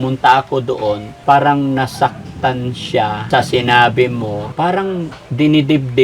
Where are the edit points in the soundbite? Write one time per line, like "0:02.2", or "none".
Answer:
0:01.1
0:03.2
0:04.4